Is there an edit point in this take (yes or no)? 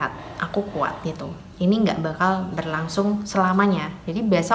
no